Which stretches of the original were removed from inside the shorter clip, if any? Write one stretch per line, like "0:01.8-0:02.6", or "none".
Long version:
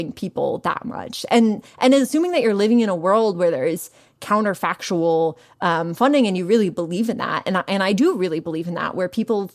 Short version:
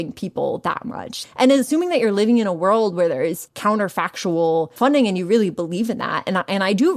0:01.2-0:01.6
0:03.9-0:04.1
0:05.4-0:05.9